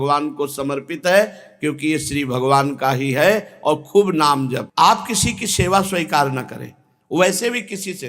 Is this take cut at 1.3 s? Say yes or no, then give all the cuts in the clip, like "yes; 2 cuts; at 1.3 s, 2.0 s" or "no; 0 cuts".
no; 1 cut; at 4.7 s